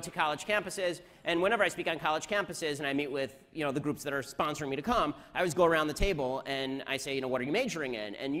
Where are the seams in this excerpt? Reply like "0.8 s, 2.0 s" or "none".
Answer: 5.4 s